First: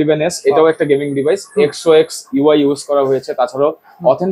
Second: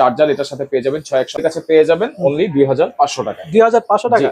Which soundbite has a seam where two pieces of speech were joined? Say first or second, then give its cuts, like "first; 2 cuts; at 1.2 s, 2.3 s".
second; 1 cut; at 1.4 s